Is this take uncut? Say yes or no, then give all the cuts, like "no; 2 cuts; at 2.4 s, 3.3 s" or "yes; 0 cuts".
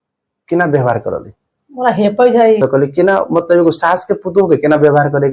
no; 1 cut; at 2.6 s